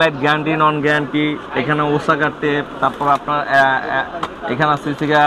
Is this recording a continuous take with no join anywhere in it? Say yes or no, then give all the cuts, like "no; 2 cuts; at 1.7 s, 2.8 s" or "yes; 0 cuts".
yes; 0 cuts